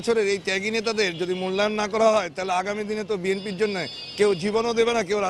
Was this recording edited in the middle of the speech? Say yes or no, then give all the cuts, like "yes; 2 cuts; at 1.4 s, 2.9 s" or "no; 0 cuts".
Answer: no; 0 cuts